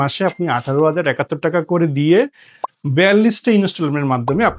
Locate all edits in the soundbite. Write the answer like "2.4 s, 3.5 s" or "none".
none